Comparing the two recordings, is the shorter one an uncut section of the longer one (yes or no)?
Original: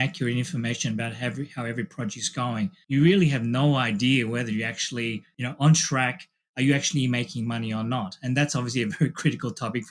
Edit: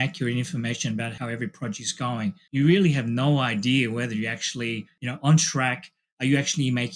no